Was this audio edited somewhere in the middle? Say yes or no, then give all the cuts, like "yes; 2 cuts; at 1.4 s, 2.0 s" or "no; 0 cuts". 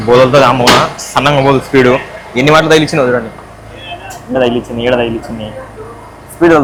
no; 0 cuts